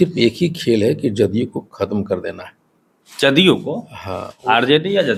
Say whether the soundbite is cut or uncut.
uncut